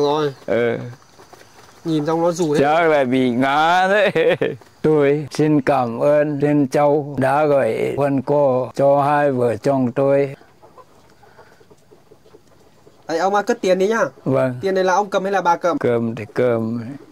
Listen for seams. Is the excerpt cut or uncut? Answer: cut